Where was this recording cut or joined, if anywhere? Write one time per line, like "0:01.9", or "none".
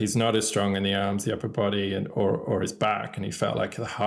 none

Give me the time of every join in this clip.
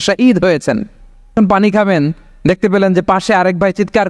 0:01.3

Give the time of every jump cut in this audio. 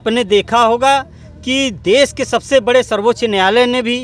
none

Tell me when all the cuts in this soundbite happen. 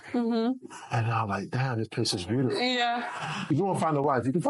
0:03.5

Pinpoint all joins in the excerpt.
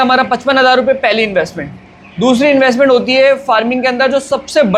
none

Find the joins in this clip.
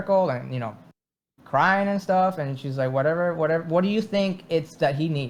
none

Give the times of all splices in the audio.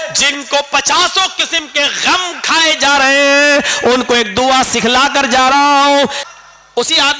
0:06.2

